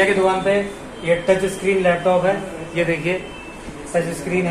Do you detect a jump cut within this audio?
no; 0 cuts

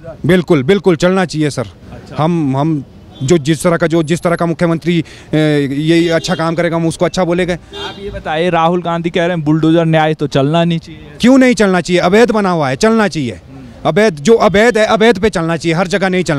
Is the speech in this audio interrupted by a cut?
no; 0 cuts

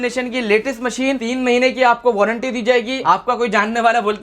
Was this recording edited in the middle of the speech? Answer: yes; 2 cuts; at 1.2 s, 3.0 s

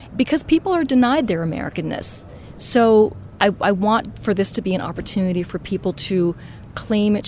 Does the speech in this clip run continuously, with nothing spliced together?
yes; 0 cuts

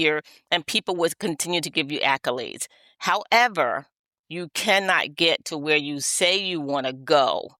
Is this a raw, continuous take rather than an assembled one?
yes; 0 cuts

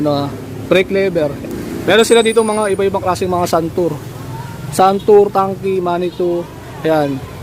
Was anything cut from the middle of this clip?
yes; 1 cut; at 1.4 s

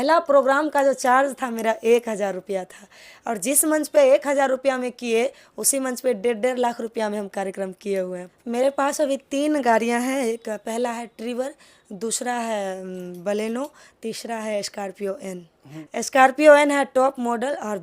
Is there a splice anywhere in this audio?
yes; 2 cuts; at 8.3 s, 15.7 s

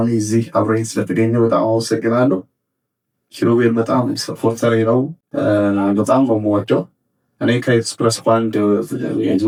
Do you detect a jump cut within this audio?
no; 0 cuts

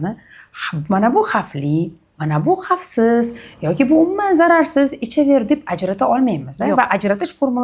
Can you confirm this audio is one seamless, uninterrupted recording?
yes; 0 cuts

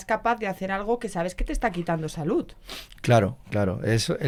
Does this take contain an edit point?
no; 0 cuts

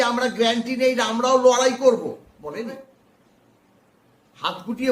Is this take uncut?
no; 1 cut; at 2.8 s

